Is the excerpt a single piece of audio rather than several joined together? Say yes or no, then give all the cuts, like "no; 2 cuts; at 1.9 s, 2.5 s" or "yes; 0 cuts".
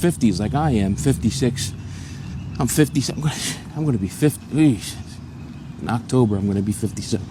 yes; 0 cuts